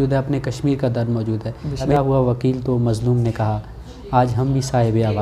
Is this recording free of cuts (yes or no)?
no